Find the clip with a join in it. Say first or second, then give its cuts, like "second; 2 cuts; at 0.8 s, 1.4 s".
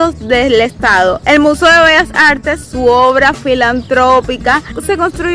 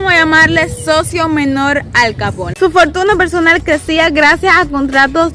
second; 1 cut; at 2.4 s